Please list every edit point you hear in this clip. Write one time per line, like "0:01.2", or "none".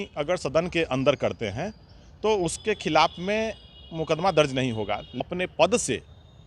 0:05.2